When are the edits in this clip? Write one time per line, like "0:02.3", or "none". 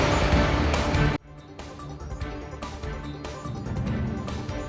none